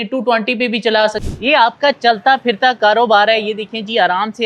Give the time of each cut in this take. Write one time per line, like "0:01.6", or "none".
0:01.2